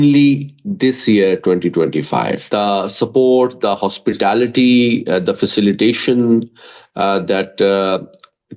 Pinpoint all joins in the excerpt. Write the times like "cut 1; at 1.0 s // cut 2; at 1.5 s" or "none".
cut 1; at 2.4 s